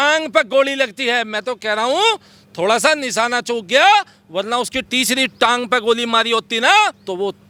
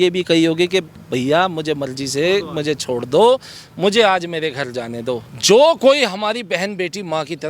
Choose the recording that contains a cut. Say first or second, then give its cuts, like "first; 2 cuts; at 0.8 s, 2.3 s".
second; 1 cut; at 5.3 s